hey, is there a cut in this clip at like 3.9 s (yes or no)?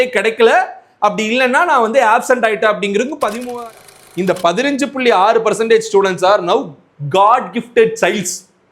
yes